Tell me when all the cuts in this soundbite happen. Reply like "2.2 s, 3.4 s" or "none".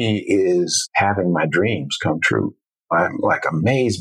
0.9 s, 2.8 s